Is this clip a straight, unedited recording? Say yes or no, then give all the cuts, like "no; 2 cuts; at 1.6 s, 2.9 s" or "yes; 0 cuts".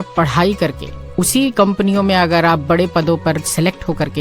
yes; 0 cuts